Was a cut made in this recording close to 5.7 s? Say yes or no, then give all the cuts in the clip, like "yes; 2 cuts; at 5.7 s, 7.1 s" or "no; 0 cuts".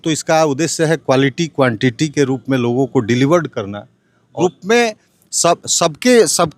no; 1 cut; at 4.3 s